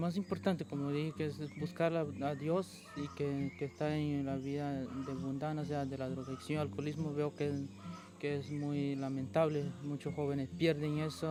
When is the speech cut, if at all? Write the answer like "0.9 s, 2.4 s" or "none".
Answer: none